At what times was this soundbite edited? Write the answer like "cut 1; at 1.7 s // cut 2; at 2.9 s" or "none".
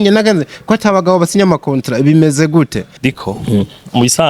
cut 1; at 2.8 s